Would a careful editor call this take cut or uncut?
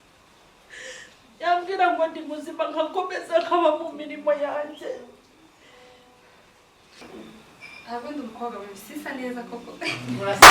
cut